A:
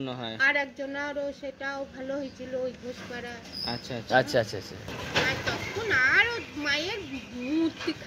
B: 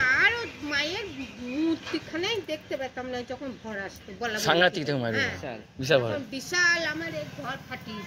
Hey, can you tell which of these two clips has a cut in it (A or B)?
A